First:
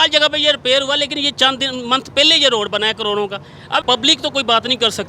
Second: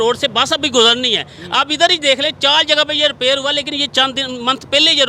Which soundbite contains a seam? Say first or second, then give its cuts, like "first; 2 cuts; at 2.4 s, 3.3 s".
first; 1 cut; at 4.0 s